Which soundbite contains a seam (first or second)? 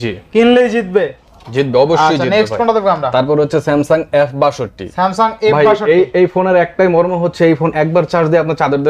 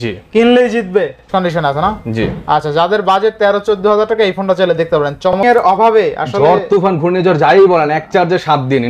second